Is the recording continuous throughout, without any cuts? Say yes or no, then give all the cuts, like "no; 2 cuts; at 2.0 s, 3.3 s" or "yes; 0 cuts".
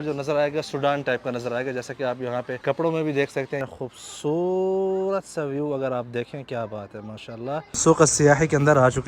no; 3 cuts; at 2.5 s, 3.7 s, 7.8 s